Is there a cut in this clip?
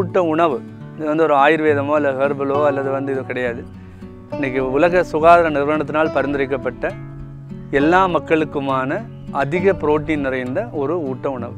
no; 0 cuts

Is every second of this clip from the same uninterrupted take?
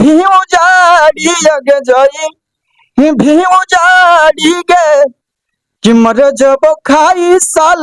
yes; 0 cuts

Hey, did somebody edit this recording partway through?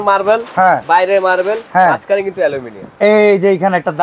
no; 0 cuts

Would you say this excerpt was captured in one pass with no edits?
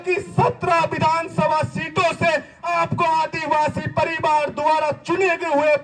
yes; 0 cuts

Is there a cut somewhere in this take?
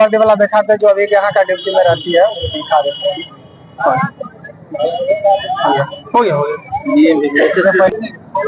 no; 0 cuts

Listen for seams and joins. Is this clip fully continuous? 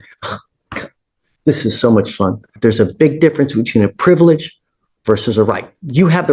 no; 1 cut; at 2.6 s

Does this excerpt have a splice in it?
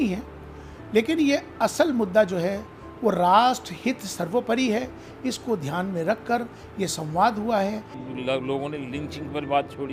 yes; 1 cut; at 8.0 s

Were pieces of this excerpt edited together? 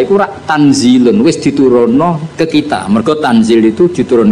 yes; 1 cut; at 2.2 s

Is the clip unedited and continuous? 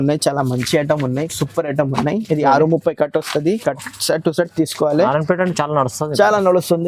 yes; 0 cuts

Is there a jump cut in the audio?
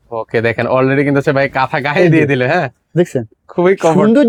no; 0 cuts

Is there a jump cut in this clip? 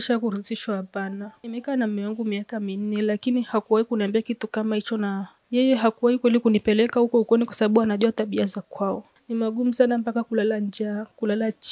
yes; 2 cuts; at 1.3 s, 9.1 s

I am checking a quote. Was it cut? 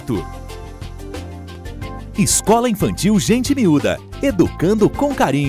yes; 1 cut; at 2.1 s

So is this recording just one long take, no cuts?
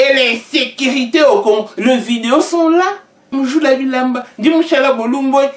no; 1 cut; at 3.3 s

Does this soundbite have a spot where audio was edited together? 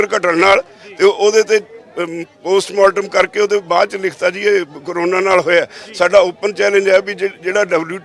no; 0 cuts

